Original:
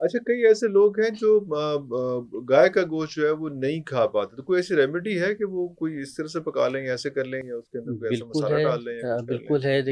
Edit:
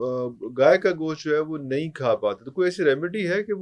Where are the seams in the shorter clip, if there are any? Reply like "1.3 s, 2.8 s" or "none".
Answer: none